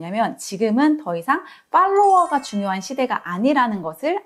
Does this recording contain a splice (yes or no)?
no